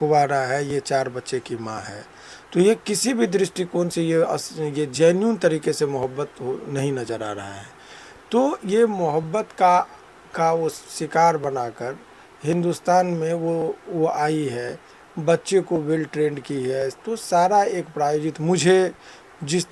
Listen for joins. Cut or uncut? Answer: uncut